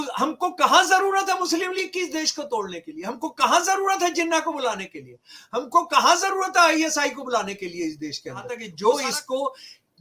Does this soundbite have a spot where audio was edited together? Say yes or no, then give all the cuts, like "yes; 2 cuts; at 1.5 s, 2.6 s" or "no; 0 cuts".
yes; 1 cut; at 8.6 s